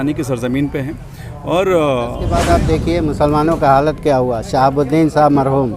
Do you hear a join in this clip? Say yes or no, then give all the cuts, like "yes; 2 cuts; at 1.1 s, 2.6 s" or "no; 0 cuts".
yes; 1 cut; at 2.4 s